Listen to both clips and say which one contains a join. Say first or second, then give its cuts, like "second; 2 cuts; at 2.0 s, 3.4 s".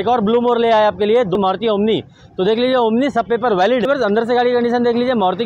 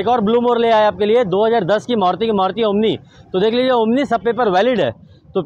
first; 2 cuts; at 1.4 s, 3.9 s